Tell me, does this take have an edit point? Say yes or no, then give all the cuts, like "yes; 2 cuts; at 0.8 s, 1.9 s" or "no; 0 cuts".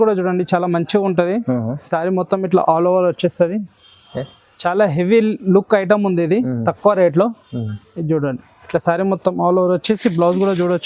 no; 0 cuts